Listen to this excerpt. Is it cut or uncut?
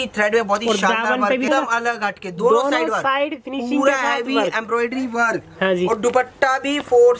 cut